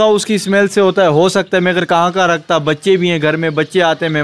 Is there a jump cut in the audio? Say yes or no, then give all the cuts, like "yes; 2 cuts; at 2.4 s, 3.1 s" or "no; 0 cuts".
no; 0 cuts